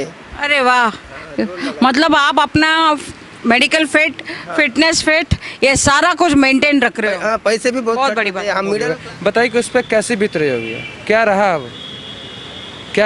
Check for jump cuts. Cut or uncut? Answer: cut